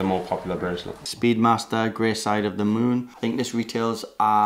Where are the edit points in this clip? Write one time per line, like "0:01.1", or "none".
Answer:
0:01.0
0:03.1